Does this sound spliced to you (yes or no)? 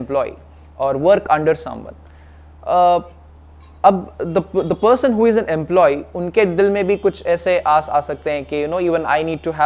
no